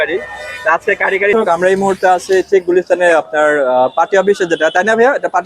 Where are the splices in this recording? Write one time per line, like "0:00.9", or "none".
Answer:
0:01.3